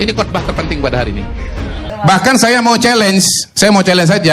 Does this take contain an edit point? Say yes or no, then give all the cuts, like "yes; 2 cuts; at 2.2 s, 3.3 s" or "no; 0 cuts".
yes; 1 cut; at 1.8 s